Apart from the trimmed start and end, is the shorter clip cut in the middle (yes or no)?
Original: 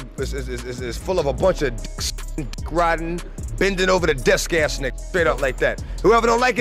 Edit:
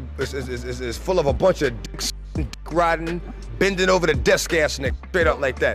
no